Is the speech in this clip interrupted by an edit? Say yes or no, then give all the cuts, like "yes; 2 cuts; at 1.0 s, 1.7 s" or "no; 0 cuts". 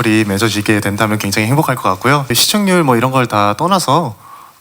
yes; 1 cut; at 2.3 s